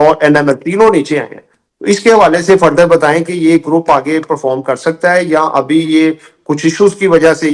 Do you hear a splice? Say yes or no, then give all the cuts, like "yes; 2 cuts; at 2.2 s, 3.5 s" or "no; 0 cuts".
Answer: no; 0 cuts